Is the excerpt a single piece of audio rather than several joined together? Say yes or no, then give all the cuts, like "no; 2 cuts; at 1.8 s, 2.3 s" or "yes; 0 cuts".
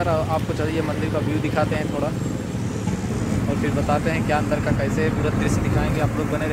yes; 0 cuts